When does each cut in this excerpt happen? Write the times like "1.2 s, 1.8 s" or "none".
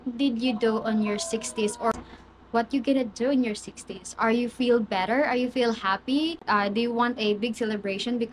1.9 s, 6.4 s